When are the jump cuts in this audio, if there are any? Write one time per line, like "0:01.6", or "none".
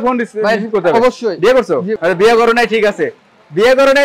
0:01.9